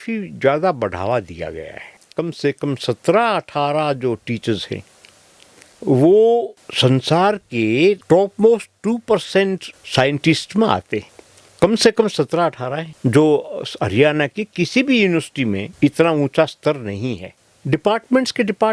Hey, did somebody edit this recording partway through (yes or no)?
yes